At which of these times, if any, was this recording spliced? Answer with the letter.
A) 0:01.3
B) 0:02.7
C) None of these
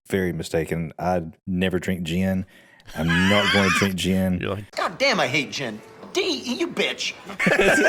C